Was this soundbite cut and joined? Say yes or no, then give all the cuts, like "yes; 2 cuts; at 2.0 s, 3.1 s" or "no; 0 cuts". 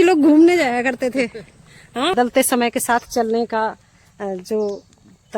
yes; 1 cut; at 2.1 s